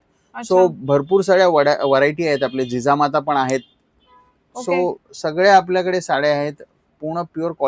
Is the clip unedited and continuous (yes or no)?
yes